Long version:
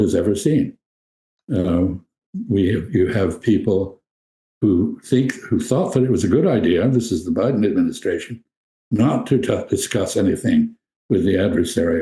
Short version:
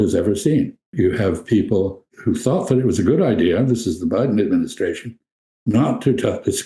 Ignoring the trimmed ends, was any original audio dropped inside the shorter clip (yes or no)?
yes